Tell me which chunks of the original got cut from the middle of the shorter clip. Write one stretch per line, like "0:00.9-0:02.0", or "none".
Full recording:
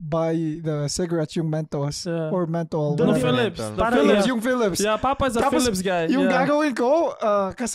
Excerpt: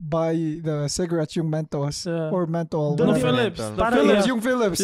none